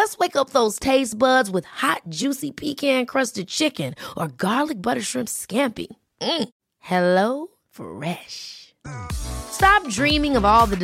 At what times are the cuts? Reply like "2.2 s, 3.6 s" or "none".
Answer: none